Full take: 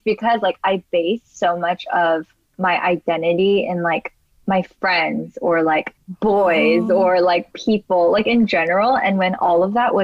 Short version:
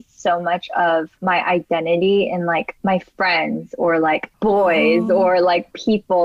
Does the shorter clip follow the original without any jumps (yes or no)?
no